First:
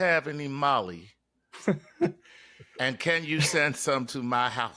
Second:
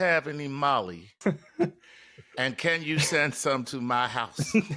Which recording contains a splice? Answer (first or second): second